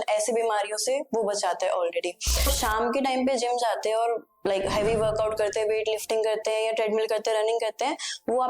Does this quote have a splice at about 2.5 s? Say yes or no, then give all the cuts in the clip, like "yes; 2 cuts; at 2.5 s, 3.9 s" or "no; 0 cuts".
yes; 1 cut; at 2.5 s